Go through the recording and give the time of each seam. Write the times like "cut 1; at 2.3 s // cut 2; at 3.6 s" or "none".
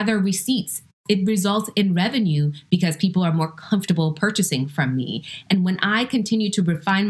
cut 1; at 1.0 s